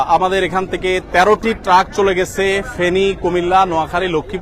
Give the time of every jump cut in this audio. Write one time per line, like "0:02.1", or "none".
none